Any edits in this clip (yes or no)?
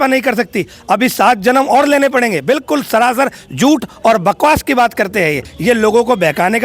yes